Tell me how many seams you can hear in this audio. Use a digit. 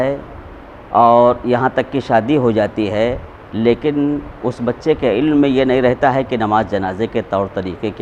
0